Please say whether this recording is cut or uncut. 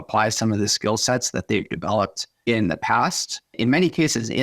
cut